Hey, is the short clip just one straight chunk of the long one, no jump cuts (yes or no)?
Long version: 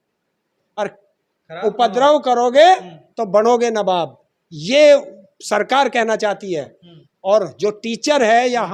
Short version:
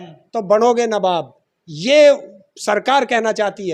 yes